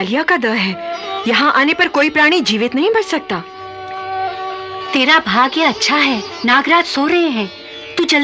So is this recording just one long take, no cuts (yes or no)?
yes